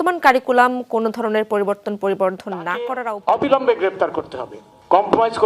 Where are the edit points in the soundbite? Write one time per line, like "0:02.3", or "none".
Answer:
0:02.9